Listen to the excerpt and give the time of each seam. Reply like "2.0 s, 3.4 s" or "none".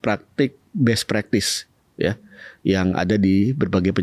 none